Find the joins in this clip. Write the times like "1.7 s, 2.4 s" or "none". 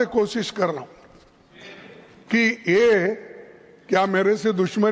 none